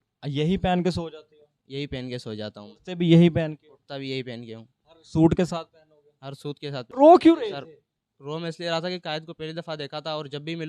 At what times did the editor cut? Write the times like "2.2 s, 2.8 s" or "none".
6.9 s